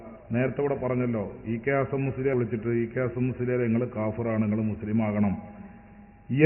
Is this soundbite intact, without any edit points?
no; 1 cut; at 2.3 s

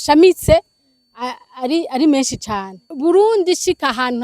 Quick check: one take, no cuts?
no; 1 cut; at 2.9 s

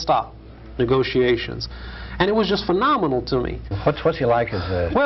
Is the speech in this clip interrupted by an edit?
yes; 1 cut; at 3.8 s

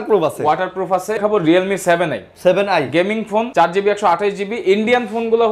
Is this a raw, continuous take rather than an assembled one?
no; 2 cuts; at 1.2 s, 3.5 s

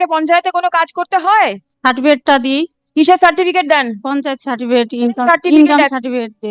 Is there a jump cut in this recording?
yes; 1 cut; at 1.7 s

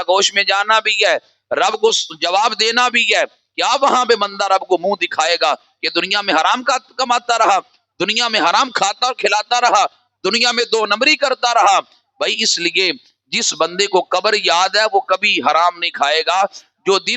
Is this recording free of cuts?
yes; 0 cuts

